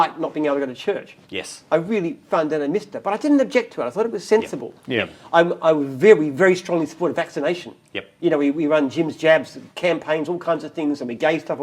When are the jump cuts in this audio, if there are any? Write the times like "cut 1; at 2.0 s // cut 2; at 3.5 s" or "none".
none